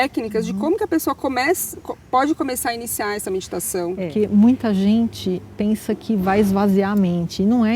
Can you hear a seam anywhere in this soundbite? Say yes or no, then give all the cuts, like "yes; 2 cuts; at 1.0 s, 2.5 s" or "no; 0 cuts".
yes; 1 cut; at 4.0 s